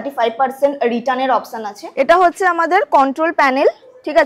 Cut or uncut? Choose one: cut